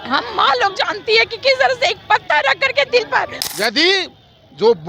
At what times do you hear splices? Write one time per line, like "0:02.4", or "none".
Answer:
0:03.4